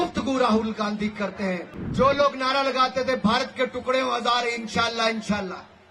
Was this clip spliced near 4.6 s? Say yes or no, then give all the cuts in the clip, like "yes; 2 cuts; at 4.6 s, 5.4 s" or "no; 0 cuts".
no; 1 cut; at 1.8 s